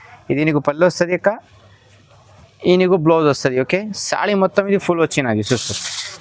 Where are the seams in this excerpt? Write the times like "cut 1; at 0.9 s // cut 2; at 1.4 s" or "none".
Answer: none